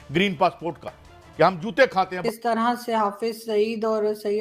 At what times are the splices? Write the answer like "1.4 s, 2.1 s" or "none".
2.2 s